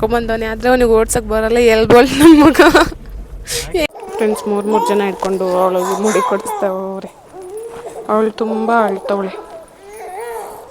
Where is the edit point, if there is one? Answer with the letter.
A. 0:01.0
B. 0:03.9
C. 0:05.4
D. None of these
B